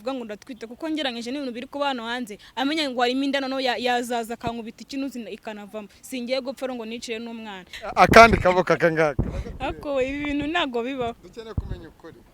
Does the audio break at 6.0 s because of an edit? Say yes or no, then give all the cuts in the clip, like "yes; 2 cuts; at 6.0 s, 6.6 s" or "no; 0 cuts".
no; 1 cut; at 7.7 s